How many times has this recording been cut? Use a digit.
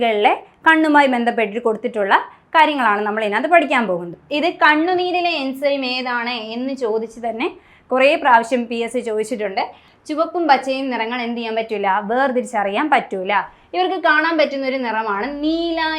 2